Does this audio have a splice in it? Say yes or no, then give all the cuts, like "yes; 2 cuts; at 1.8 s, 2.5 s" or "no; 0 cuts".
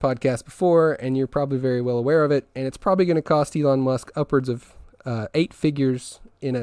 no; 0 cuts